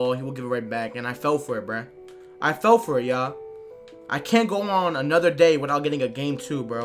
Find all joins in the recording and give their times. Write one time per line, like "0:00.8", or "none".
0:02.2

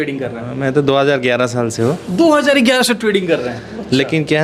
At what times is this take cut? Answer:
none

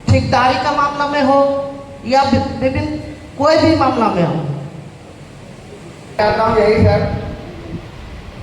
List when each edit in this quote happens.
0:06.2

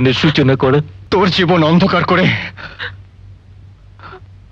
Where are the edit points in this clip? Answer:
0:01.0

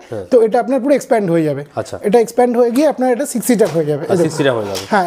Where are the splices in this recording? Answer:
none

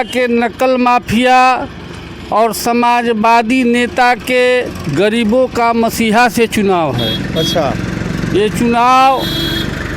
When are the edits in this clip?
none

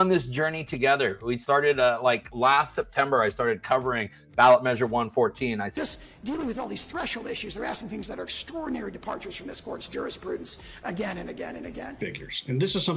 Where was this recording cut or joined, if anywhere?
0:05.7
0:12.0

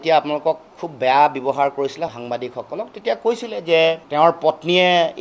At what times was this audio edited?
0:04.0

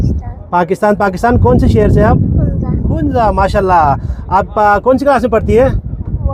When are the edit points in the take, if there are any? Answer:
none

